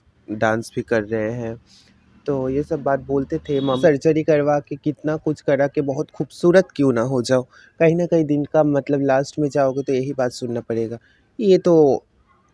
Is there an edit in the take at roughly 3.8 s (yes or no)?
yes